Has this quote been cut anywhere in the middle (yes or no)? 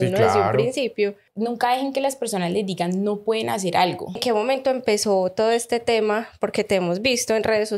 yes